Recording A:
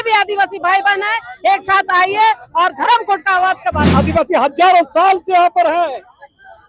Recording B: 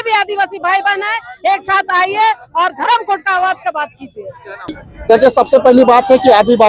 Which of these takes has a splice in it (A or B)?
A